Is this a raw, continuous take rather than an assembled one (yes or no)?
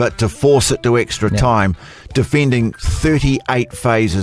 yes